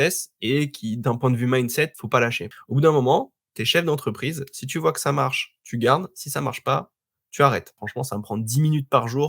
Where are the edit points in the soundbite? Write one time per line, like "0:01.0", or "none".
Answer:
0:02.2
0:07.8